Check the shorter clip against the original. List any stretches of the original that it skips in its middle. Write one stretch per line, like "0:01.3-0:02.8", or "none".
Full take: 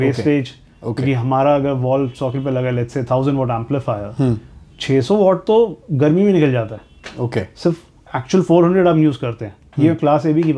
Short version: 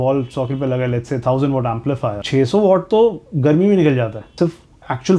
0:04.0-0:04.8
0:06.8-0:07.5